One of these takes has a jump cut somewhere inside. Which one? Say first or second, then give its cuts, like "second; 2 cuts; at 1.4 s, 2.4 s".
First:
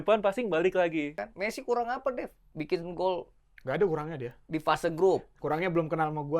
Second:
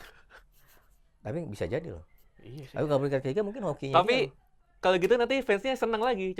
first; 1 cut; at 1.2 s